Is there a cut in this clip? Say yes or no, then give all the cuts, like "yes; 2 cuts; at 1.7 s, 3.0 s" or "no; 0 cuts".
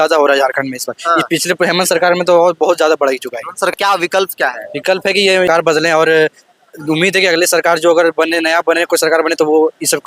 yes; 2 cuts; at 3.7 s, 5.5 s